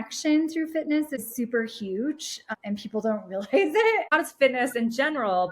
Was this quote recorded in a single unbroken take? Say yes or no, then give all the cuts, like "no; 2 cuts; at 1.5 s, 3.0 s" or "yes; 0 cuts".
no; 3 cuts; at 1.2 s, 2.5 s, 4.1 s